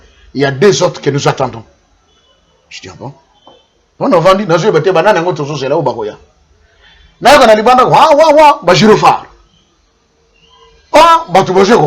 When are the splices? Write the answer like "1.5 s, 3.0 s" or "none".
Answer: none